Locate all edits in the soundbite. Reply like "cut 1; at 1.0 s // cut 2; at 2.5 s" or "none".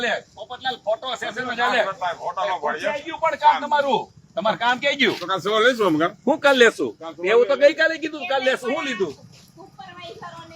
none